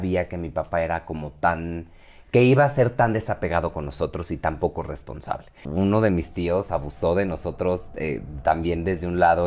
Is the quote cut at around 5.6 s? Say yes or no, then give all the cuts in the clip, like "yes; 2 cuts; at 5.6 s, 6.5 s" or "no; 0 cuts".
yes; 1 cut; at 5.6 s